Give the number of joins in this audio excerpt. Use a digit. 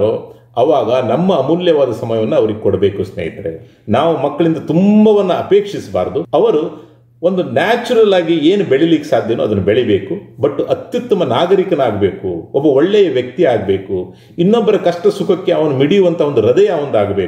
2